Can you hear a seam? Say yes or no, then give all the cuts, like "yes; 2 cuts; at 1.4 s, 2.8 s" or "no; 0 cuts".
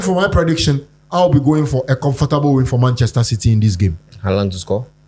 no; 0 cuts